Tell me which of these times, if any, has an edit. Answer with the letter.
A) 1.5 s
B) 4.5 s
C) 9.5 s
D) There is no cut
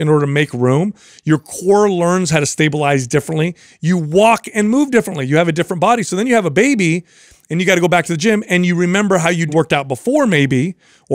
C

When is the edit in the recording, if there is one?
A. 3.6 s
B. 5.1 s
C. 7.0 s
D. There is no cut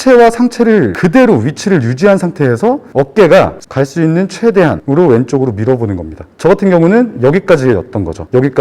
A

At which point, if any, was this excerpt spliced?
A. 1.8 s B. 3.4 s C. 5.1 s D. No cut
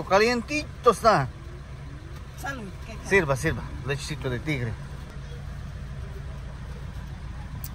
C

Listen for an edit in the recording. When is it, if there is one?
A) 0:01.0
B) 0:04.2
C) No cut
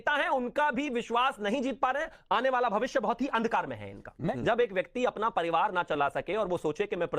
B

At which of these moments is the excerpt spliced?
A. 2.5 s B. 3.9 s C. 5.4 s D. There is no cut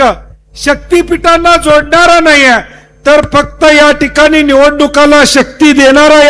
D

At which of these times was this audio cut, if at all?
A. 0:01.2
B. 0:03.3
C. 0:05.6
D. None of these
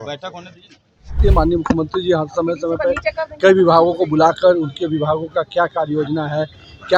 A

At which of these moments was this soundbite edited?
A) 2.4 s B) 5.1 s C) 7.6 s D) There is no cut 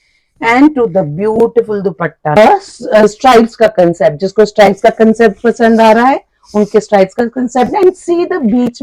A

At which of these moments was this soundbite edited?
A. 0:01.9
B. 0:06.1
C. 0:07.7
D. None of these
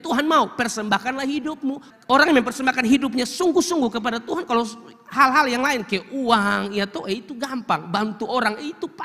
A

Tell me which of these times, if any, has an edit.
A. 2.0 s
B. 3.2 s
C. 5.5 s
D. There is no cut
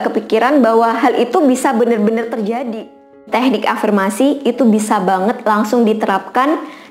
B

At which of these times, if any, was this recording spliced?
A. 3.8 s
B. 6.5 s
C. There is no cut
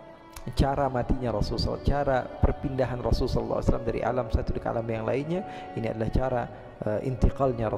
C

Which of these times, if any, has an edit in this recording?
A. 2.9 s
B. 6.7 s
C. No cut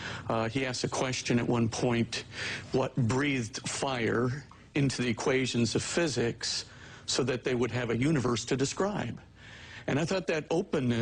A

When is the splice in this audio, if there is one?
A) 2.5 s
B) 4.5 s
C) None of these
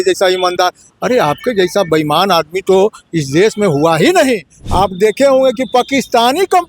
B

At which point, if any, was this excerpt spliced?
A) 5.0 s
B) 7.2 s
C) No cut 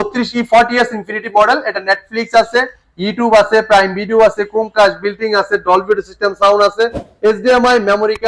C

